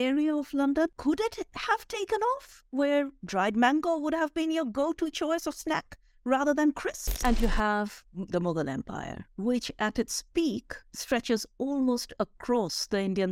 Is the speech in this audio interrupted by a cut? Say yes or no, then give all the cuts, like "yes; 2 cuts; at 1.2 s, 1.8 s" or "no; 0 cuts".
yes; 2 cuts; at 0.9 s, 7.1 s